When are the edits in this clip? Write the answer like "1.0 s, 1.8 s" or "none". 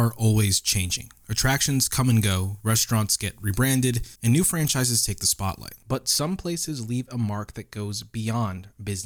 none